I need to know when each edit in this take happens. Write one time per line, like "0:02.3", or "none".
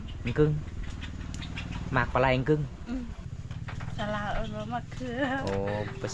0:03.2